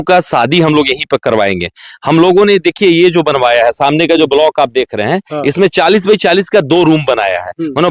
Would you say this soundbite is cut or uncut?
uncut